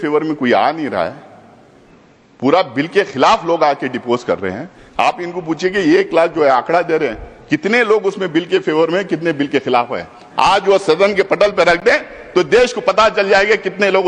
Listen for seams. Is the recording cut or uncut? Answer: uncut